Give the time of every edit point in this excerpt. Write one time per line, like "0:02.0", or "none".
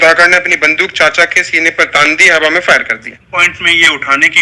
0:03.2